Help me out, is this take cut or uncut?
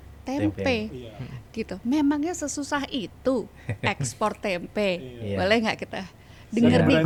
uncut